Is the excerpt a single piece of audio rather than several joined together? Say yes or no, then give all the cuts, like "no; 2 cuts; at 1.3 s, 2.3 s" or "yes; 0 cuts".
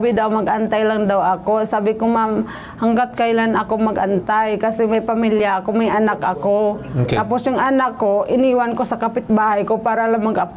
yes; 0 cuts